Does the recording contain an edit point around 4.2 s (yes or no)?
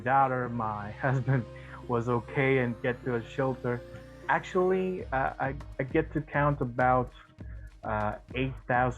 yes